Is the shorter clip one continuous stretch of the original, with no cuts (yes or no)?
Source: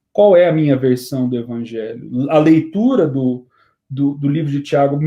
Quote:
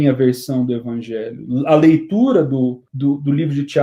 no